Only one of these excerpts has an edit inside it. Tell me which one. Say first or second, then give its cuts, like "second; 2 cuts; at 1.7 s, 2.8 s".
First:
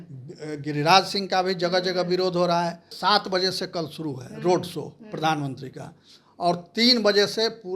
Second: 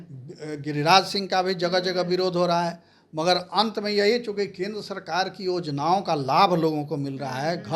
first; 1 cut; at 2.9 s